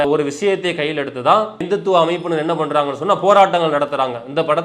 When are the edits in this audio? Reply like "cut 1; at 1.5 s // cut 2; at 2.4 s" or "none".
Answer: none

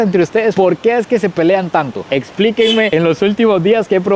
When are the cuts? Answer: none

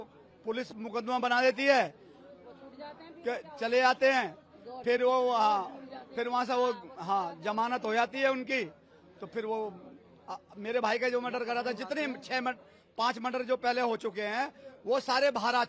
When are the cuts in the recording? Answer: none

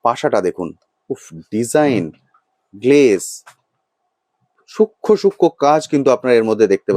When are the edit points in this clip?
none

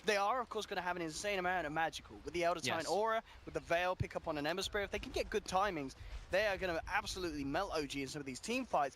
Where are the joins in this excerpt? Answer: cut 1; at 5.0 s

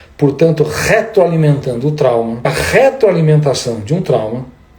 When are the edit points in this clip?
cut 1; at 2.5 s

